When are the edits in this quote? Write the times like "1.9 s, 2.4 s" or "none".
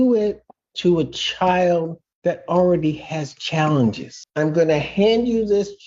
4.2 s